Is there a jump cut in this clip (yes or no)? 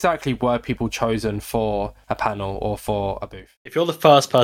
yes